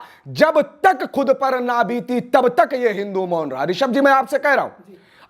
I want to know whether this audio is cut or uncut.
uncut